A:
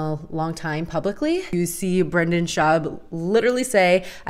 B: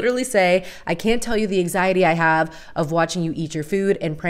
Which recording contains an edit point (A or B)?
A